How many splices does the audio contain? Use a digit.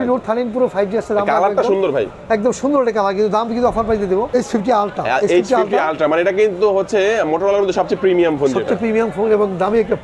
1